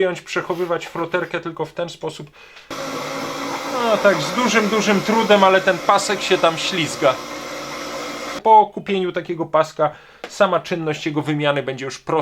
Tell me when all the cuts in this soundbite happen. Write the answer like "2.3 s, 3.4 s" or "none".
2.7 s, 8.4 s